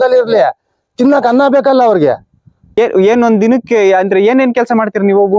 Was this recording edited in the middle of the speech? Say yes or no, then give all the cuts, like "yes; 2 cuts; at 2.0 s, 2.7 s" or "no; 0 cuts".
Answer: yes; 1 cut; at 2.8 s